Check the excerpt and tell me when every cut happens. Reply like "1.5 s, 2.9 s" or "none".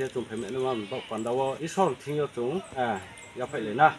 1.6 s, 2.7 s